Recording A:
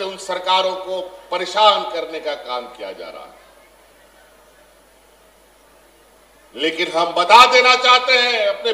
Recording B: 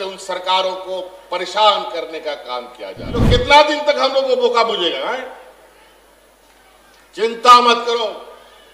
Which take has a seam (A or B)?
B